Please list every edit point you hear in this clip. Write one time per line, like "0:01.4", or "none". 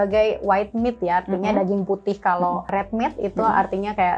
0:02.7

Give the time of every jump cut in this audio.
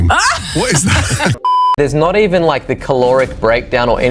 0:01.4

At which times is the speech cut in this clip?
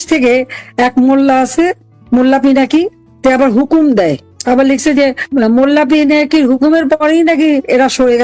none

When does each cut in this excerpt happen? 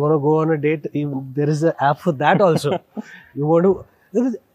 none

